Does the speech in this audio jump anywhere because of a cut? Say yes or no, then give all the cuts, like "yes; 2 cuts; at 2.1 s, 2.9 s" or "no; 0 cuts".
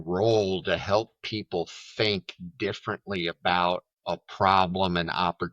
yes; 1 cut; at 3.9 s